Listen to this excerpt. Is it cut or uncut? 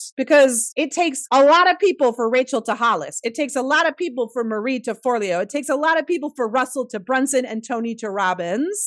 uncut